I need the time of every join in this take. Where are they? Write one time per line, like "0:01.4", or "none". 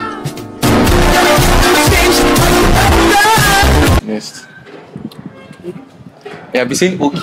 0:04.0